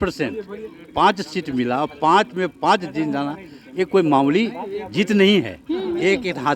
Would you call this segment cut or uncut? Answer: uncut